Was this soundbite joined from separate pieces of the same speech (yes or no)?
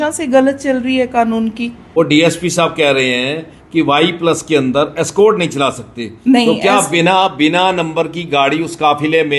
yes